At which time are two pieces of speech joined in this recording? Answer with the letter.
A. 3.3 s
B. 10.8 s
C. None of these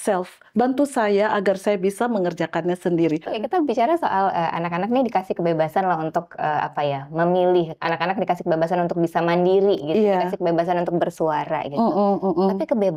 A